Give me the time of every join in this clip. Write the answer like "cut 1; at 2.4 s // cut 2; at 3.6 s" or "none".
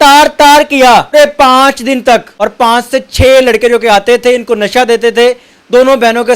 cut 1; at 1.1 s // cut 2; at 2.3 s